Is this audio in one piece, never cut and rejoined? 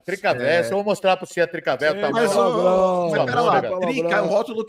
yes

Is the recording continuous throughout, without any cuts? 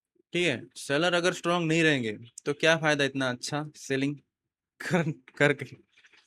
yes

